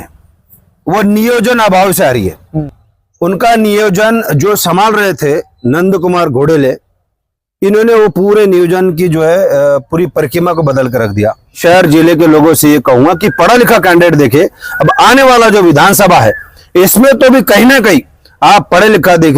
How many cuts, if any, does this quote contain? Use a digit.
2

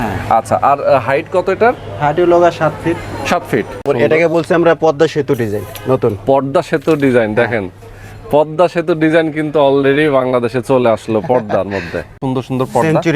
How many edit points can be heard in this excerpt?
2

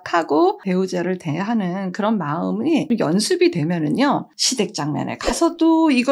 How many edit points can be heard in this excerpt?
1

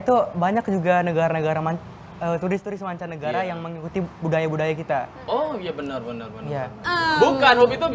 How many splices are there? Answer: 1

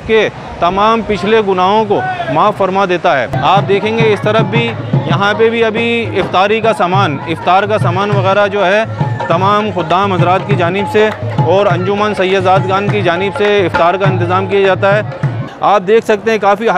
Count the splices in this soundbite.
2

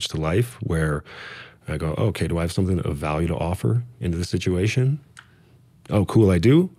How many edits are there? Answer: 0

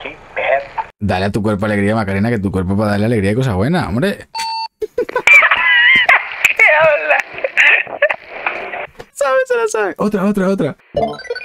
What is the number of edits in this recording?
1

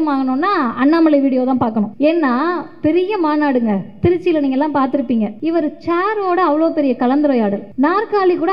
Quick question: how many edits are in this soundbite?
3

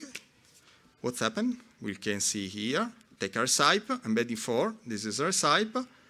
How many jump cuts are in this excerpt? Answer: 1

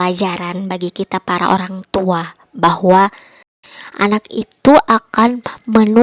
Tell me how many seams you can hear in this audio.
1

